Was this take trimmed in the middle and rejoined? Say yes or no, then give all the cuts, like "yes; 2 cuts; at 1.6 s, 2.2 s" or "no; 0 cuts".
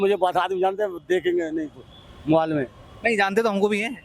no; 0 cuts